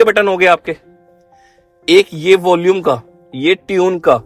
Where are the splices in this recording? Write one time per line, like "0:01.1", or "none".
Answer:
none